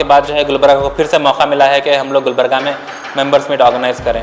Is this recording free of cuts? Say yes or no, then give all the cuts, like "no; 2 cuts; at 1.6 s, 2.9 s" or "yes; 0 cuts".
yes; 0 cuts